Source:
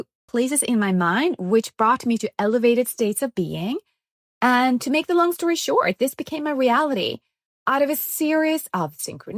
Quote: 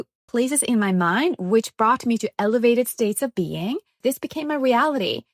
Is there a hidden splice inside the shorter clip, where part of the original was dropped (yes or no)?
yes